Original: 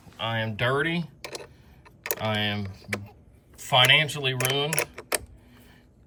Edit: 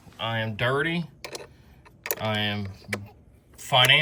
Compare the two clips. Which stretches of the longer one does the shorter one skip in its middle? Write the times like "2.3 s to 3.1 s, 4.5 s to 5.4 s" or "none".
none